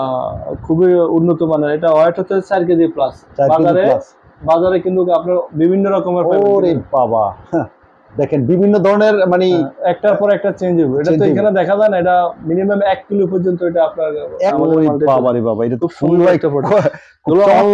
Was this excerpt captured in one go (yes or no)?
no